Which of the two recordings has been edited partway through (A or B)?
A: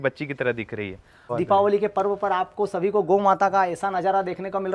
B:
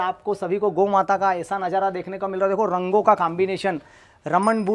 A